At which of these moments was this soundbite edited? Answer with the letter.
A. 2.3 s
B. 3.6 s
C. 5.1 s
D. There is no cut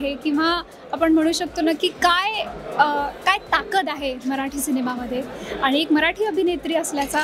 D